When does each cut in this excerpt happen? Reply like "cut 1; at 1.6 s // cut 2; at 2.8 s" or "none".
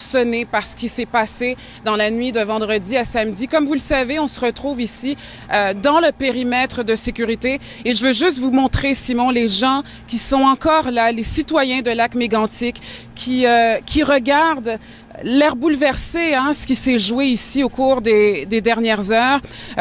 cut 1; at 16.2 s